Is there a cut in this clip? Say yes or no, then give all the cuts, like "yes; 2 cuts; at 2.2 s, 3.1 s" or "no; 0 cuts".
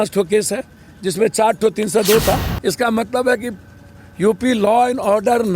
yes; 1 cut; at 2.5 s